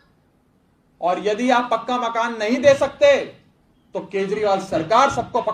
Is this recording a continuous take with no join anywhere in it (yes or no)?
yes